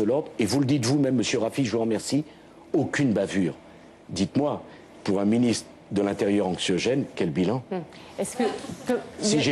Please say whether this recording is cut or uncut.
uncut